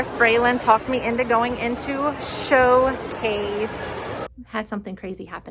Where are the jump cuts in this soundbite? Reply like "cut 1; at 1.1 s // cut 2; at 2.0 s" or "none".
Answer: cut 1; at 4.4 s